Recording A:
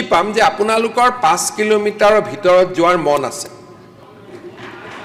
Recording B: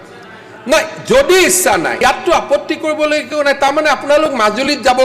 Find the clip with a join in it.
B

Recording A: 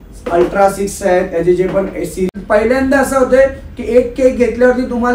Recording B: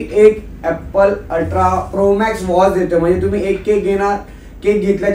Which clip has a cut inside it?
A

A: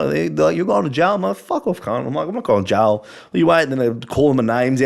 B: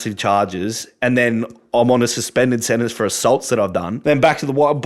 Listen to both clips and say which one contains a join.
B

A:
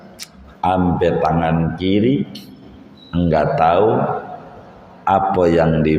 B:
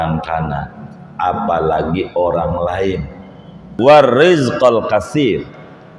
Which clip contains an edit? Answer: B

